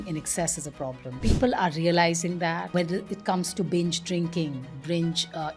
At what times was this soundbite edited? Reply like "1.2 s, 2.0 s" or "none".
1.2 s, 2.7 s